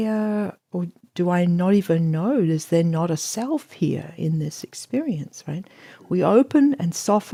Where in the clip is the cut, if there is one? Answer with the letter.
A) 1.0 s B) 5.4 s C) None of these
C